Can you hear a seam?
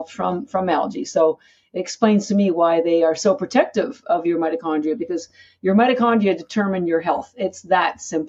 no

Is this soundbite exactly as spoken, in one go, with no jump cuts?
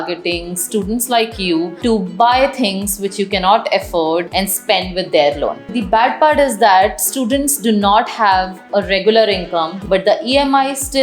no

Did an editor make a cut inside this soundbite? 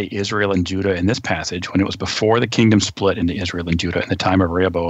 no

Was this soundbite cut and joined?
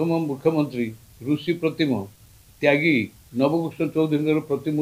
yes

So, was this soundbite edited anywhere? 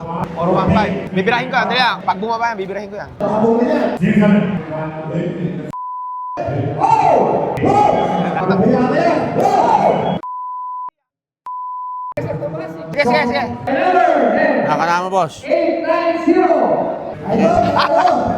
no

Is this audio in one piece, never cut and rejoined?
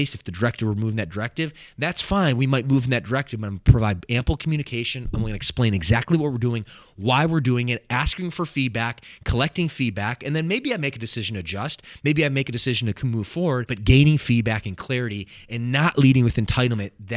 no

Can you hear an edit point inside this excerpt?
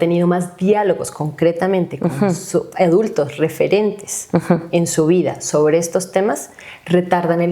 no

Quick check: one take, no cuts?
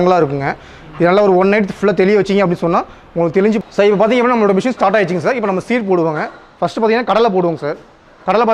no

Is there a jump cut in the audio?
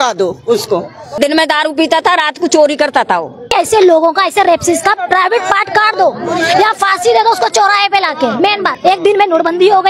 yes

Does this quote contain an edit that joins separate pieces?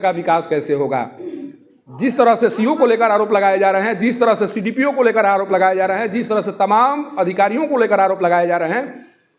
no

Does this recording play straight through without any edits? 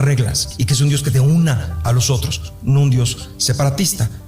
no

